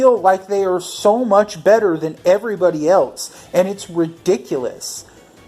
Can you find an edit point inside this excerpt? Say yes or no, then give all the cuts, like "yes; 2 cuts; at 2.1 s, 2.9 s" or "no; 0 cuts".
no; 0 cuts